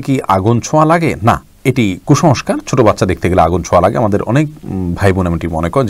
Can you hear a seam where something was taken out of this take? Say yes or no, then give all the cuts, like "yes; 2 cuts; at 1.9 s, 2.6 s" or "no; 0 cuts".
no; 0 cuts